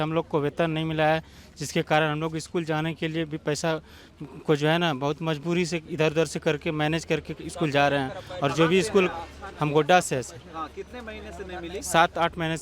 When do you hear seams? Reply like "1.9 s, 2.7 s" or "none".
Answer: none